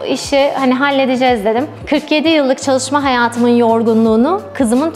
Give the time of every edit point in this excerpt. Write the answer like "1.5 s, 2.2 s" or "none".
1.7 s